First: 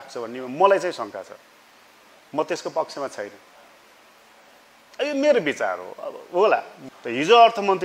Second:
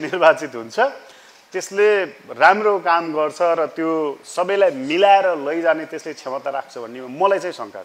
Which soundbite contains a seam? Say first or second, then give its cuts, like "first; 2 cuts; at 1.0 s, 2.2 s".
first; 1 cut; at 6.8 s